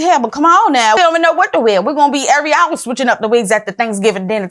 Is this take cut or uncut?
cut